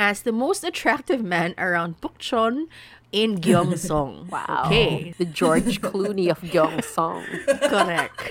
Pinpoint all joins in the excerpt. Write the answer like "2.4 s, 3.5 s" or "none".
5.1 s